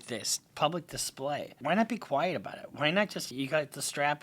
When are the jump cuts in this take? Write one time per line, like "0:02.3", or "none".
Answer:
0:01.5
0:03.3